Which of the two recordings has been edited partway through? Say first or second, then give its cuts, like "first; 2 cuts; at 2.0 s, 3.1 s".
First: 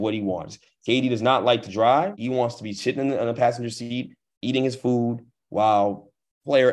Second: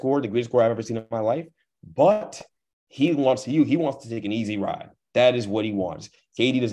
first; 1 cut; at 2.2 s